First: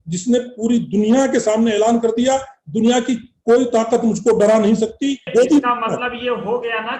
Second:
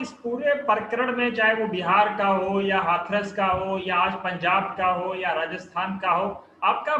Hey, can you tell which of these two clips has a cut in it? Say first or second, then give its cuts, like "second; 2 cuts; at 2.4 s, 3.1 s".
first; 1 cut; at 5.3 s